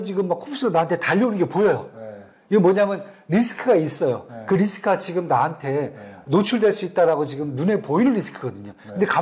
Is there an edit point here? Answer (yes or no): no